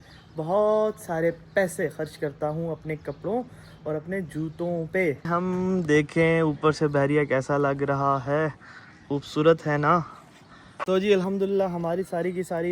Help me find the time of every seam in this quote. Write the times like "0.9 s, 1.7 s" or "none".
5.3 s, 10.8 s